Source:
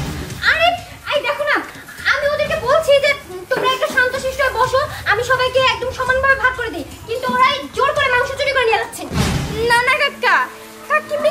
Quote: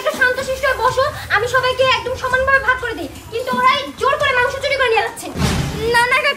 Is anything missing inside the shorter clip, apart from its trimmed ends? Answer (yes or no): no